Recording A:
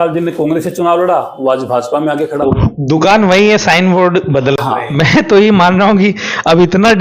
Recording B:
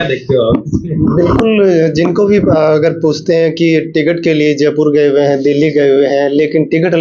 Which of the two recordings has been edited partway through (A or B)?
A